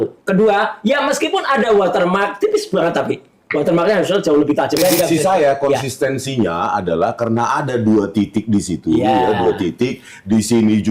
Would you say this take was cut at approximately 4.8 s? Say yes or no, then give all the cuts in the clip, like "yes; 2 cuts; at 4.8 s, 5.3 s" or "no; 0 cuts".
yes; 1 cut; at 4.8 s